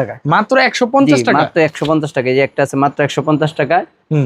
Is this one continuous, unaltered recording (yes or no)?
yes